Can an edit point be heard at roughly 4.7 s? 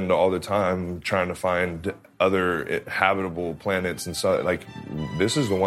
no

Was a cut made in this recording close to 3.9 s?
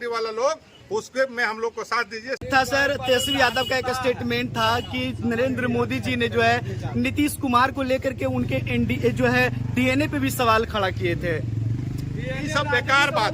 no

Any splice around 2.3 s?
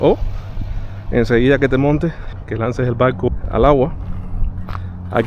yes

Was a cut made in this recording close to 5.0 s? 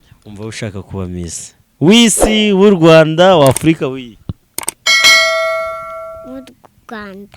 yes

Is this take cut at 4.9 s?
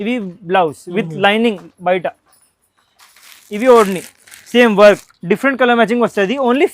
yes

